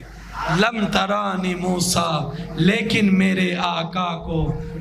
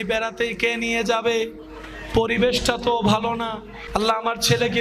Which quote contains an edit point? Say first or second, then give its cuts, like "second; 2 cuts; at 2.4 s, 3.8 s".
second; 1 cut; at 3.7 s